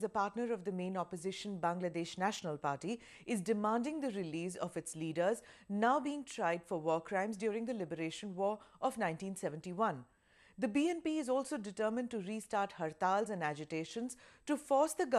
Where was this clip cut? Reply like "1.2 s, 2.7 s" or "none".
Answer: none

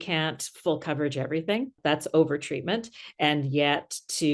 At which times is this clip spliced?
1.8 s

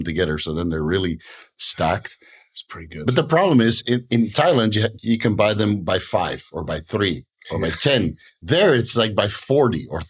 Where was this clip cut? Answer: none

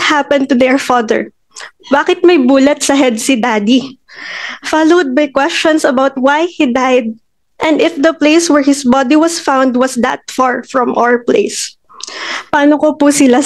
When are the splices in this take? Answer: none

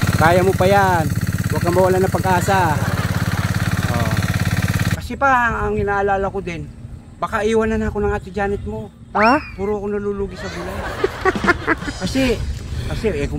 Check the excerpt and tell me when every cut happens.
4.9 s

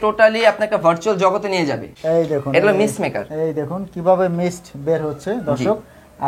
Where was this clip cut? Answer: 1.9 s

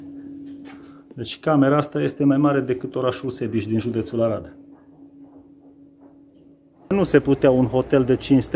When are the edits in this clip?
6.9 s

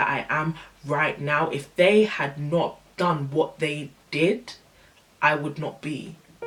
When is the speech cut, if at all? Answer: none

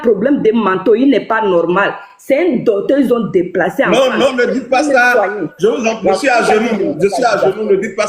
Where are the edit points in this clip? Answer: none

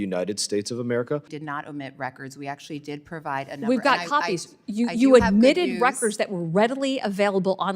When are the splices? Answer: 1.3 s

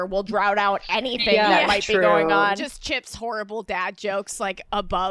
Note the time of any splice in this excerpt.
2.7 s

